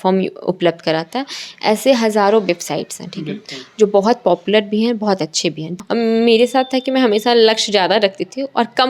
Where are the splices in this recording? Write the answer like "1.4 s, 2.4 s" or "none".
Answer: 5.7 s